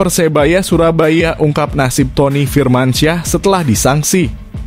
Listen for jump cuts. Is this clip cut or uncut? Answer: uncut